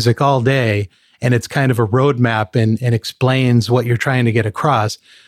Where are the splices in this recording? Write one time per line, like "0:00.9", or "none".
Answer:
none